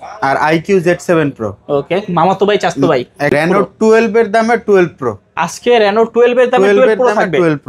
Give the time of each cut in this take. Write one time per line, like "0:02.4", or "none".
0:03.3